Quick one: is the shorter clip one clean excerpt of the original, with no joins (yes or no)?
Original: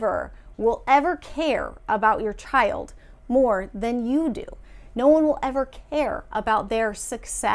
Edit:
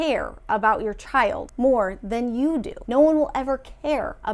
no